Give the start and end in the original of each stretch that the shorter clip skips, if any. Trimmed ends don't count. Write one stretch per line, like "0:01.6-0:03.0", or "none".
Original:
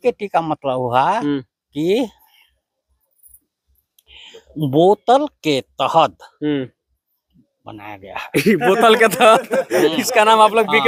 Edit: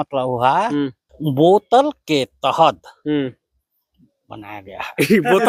0:01.6-0:04.4